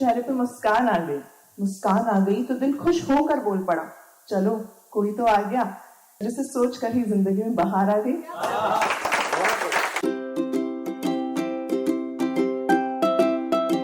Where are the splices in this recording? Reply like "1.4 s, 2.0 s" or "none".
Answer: 10.0 s